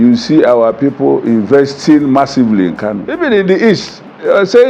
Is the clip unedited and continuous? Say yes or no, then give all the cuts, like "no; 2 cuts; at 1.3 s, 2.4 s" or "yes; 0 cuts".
no; 1 cut; at 3.0 s